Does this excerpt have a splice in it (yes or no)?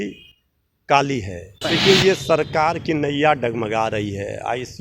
yes